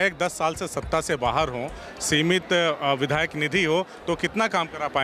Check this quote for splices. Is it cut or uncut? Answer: uncut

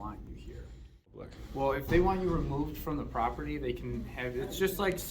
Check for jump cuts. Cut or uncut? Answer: cut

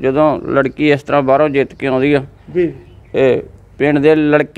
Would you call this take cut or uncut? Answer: uncut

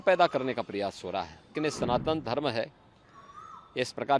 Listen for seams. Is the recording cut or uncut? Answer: cut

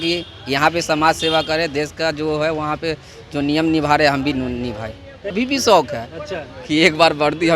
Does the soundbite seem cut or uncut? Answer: cut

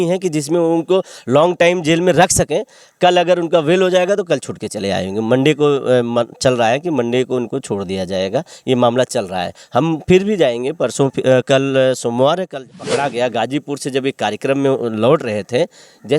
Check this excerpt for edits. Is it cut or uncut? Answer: cut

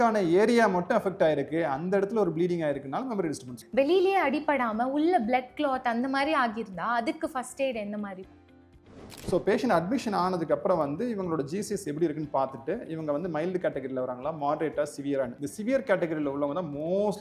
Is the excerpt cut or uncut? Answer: cut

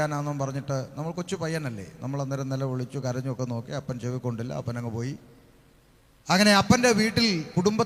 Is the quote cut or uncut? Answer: uncut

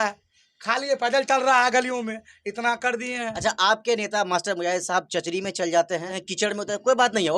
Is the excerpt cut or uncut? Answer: cut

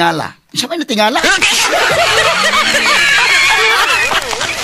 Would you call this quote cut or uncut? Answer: uncut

